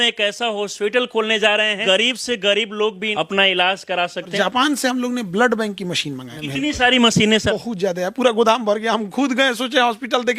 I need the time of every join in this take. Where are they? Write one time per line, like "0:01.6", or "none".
0:01.8
0:03.1
0:04.3
0:06.3
0:07.5